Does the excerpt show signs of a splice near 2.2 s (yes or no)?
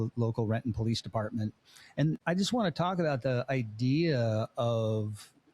yes